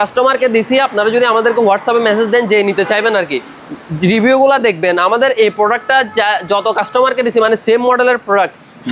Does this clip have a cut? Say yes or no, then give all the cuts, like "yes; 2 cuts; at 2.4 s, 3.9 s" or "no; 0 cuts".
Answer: no; 0 cuts